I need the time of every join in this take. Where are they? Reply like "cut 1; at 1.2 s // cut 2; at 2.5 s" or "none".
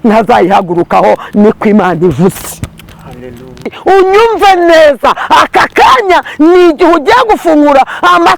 cut 1; at 3.8 s